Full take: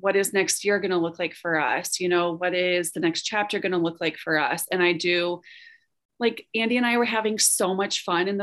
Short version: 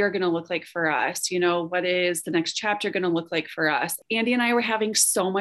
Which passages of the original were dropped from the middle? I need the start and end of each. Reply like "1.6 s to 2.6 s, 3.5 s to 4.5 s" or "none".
4.6 s to 6.4 s